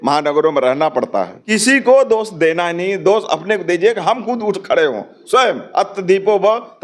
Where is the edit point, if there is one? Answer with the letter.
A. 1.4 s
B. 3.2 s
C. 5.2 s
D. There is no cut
A